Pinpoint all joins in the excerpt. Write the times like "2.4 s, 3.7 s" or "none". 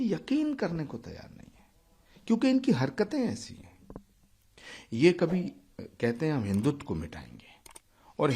none